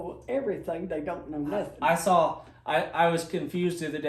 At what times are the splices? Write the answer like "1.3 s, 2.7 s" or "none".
none